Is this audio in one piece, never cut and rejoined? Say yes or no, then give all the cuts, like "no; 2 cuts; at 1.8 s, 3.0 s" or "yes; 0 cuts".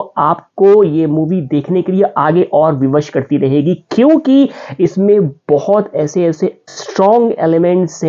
yes; 0 cuts